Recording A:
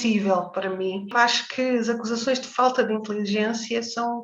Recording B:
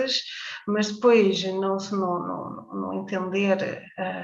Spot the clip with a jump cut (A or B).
A